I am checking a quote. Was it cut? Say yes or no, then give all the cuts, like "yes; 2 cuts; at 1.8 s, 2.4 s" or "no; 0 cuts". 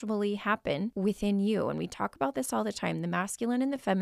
yes; 1 cut; at 0.9 s